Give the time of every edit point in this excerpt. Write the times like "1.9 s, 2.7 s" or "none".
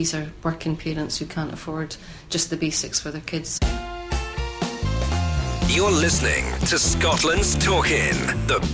3.5 s